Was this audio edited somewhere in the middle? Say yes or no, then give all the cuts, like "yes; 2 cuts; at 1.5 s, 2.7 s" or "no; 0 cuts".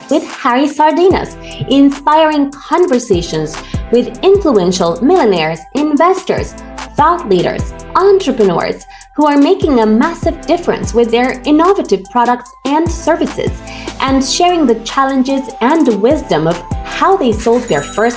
no; 0 cuts